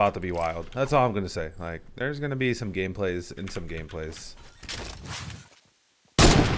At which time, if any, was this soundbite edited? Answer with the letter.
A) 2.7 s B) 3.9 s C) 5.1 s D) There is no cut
C